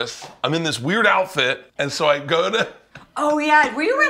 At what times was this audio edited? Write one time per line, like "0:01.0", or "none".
0:01.7